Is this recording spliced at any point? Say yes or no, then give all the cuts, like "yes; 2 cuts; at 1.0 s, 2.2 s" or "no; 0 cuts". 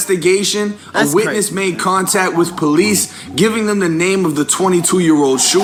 no; 0 cuts